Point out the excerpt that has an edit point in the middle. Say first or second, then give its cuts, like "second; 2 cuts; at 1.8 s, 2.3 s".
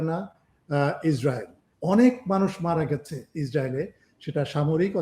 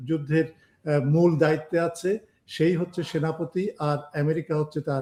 first; 1 cut; at 1.7 s